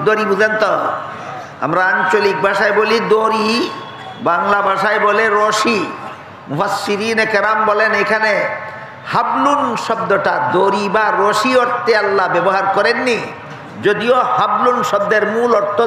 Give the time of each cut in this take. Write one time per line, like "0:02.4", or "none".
none